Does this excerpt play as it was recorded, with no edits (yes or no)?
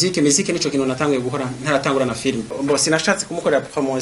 no